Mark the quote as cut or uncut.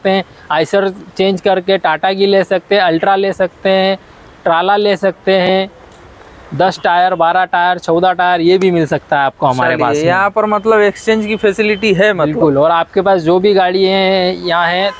uncut